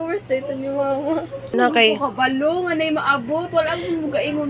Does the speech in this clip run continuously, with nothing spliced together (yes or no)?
no